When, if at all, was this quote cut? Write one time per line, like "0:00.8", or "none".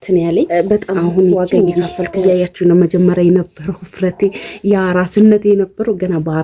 0:01.8